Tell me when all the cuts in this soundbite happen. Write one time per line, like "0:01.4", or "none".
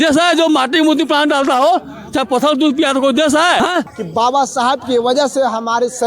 0:03.9